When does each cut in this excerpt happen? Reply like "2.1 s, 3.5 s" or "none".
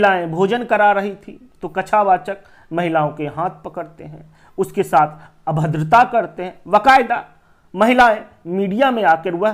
none